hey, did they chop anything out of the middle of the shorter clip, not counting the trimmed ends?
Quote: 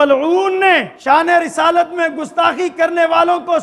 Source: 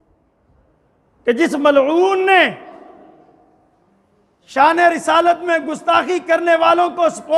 yes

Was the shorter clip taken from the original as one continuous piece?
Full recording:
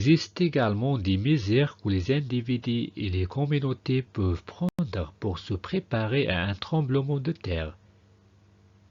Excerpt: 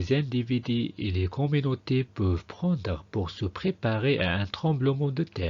no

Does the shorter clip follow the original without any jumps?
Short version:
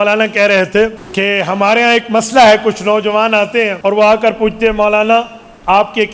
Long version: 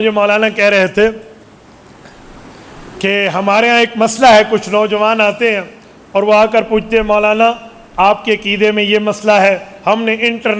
no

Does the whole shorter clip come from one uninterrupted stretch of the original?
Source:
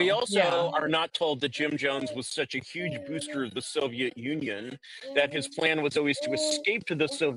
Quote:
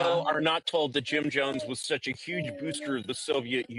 yes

